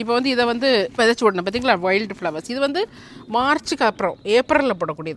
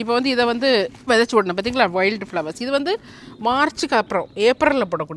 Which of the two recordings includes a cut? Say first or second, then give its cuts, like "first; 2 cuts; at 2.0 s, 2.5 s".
first; 1 cut; at 0.9 s